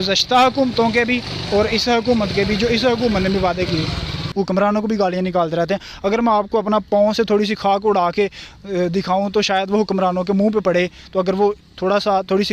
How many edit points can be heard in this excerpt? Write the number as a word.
one